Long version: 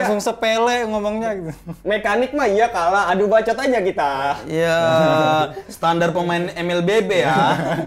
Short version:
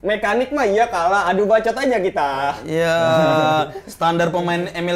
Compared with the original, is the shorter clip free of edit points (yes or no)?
yes